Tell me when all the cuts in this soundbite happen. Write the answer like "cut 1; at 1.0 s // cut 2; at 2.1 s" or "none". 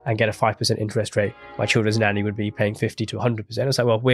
none